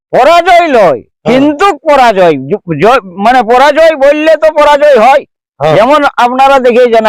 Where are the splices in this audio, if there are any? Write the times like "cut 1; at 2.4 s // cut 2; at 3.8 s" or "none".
none